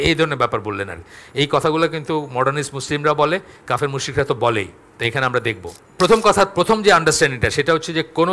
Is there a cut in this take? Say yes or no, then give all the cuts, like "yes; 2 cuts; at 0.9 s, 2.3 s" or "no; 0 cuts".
yes; 1 cut; at 5.8 s